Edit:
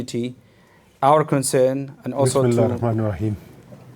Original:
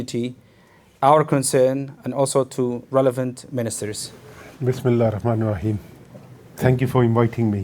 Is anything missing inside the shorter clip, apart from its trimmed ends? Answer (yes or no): yes